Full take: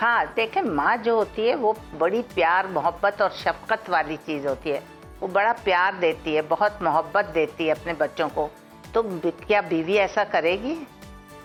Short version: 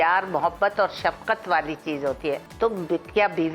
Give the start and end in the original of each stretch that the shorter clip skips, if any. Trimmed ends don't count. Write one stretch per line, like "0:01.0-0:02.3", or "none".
0:04.9-0:08.8